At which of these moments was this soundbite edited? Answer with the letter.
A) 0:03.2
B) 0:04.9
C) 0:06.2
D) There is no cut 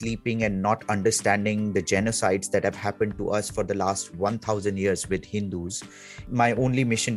C